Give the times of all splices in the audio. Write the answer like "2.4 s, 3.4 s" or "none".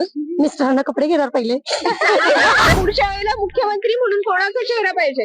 2.7 s